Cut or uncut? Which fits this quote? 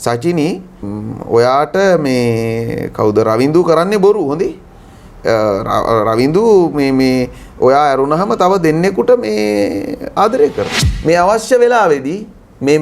cut